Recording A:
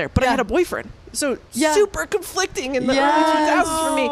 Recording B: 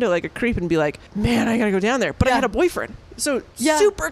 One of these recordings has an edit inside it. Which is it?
B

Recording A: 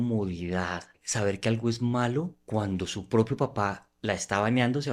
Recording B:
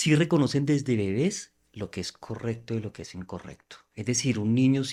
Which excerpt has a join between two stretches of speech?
A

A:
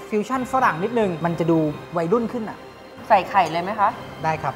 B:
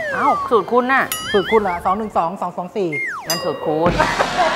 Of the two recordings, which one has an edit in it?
A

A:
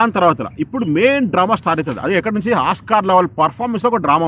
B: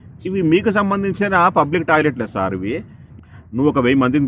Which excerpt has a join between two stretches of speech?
B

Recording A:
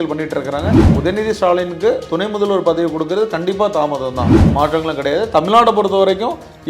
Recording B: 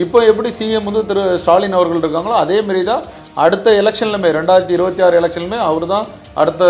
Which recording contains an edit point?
A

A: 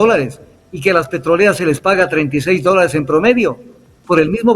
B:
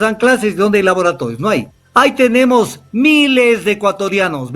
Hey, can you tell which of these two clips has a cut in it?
B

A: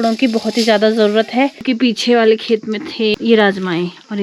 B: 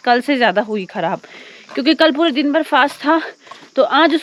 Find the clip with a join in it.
A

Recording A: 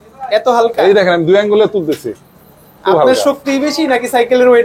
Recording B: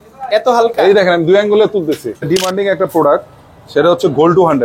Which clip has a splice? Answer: B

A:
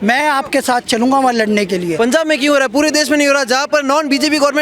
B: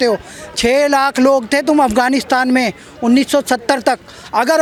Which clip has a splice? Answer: A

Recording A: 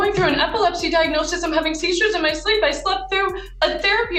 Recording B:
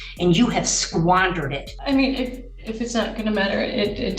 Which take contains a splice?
B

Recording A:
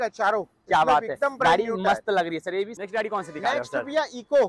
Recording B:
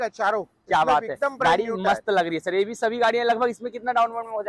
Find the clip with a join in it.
A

